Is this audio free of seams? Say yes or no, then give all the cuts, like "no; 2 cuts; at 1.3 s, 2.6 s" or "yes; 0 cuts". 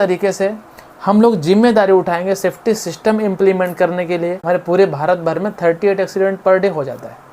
no; 1 cut; at 4.4 s